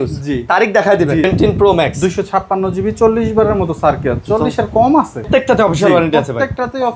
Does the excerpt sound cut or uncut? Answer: cut